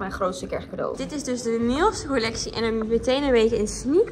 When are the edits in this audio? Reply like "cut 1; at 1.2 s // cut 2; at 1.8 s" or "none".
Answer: cut 1; at 1.0 s